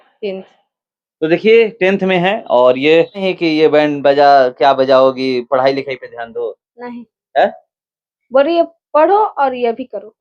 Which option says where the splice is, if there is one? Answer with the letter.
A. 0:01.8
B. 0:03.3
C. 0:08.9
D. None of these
B